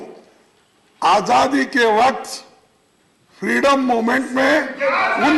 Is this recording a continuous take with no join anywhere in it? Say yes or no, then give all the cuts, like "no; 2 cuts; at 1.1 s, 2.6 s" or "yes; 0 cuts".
yes; 0 cuts